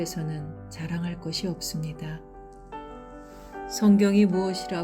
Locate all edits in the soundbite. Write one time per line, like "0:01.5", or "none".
0:01.9
0:03.8